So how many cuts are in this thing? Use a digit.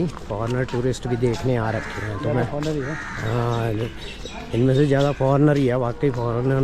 0